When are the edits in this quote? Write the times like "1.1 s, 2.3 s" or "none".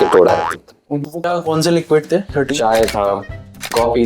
1.0 s